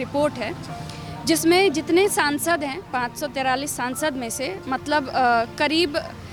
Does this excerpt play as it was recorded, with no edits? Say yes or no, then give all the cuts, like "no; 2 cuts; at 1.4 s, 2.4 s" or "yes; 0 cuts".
yes; 0 cuts